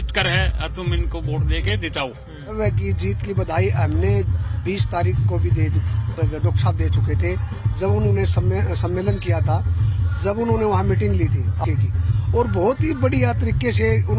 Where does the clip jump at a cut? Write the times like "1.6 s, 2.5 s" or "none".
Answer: 11.6 s